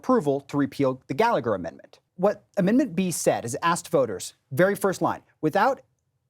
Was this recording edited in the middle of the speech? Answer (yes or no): yes